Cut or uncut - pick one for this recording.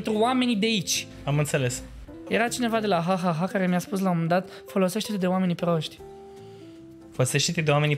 cut